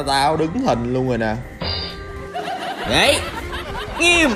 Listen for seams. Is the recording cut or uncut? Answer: cut